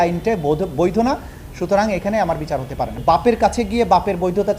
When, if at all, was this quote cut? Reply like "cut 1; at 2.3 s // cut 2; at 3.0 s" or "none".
cut 1; at 3.0 s